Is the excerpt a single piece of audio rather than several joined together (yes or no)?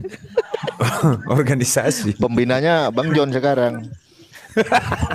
yes